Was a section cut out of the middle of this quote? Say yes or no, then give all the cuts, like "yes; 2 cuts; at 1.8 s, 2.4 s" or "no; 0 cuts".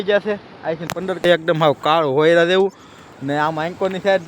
yes; 1 cut; at 1.4 s